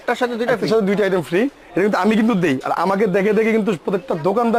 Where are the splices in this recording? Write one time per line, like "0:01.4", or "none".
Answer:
none